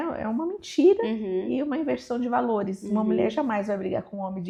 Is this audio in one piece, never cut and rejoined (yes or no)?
yes